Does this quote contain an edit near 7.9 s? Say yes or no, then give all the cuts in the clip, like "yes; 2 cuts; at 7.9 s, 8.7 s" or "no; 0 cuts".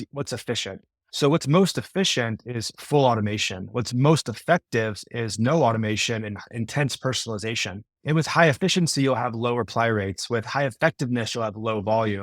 yes; 1 cut; at 7.9 s